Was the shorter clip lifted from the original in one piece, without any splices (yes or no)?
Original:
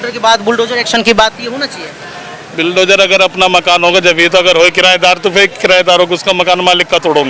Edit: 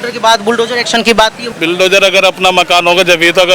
no